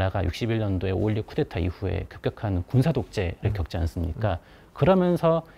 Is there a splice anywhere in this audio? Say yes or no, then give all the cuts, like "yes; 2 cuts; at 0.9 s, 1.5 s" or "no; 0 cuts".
no; 0 cuts